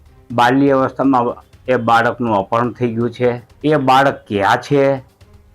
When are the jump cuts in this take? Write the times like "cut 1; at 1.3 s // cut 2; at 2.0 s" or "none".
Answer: cut 1; at 3.5 s